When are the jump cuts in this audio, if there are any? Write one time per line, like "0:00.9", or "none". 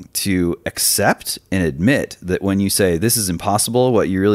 none